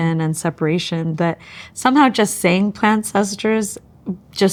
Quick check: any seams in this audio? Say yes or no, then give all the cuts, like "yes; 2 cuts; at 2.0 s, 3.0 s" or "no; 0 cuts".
no; 0 cuts